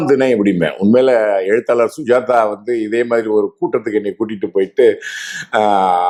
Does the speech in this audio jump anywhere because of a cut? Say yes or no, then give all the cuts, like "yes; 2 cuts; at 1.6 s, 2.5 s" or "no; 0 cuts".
no; 0 cuts